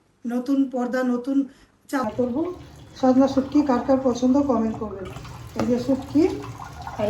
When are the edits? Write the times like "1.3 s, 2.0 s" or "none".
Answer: 2.1 s